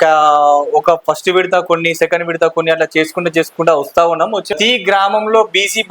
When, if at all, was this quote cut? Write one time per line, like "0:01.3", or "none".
0:04.5